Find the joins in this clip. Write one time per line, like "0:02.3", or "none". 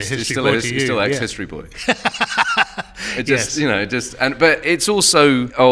none

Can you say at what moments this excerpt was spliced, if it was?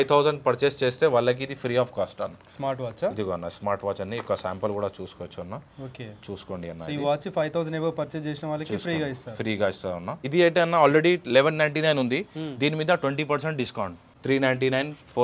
0:10.2
0:14.0

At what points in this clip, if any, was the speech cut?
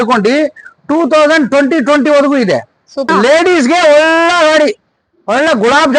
0:03.1

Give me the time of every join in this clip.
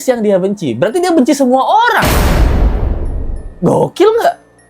none

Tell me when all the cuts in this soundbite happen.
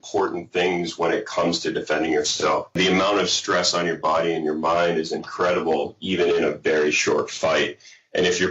0:02.8

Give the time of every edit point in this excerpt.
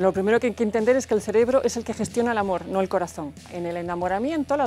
0:03.3

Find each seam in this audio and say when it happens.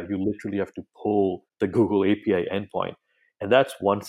0:01.5

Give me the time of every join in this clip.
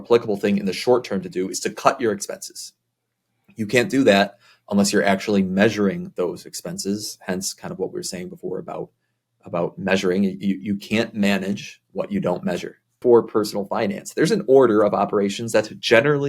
0:13.0

